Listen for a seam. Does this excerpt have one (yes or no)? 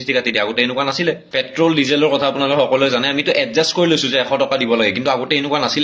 yes